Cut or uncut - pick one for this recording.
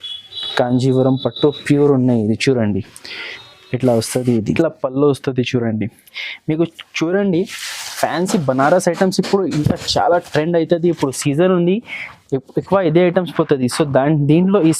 cut